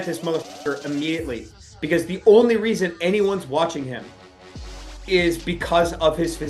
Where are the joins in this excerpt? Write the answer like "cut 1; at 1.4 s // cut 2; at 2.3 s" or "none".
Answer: none